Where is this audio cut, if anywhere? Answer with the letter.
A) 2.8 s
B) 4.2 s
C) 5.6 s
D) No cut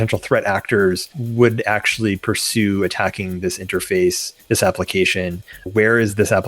C